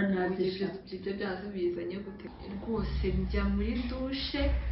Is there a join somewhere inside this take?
yes; 1 cut; at 2.2 s

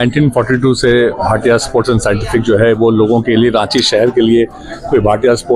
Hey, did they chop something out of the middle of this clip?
no; 0 cuts

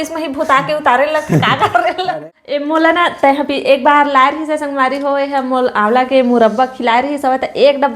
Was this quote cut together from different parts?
yes; 1 cut; at 2.1 s

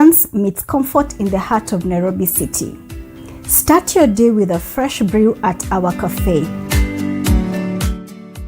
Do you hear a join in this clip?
yes; 1 cut; at 1.1 s

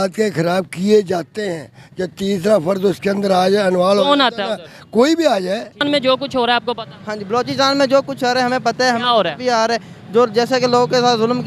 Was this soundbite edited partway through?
yes; 1 cut; at 5.8 s

